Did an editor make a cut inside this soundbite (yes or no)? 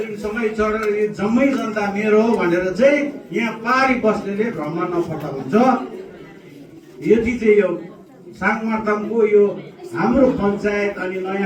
no